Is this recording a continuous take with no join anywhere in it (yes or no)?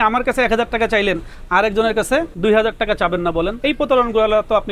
no